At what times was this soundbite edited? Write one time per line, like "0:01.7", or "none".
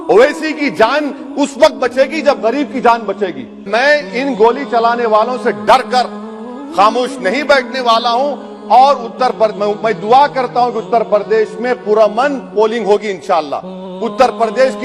0:03.6